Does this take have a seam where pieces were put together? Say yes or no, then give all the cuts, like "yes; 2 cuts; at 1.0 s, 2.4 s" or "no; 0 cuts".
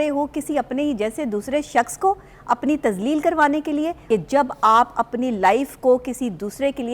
yes; 1 cut; at 4.0 s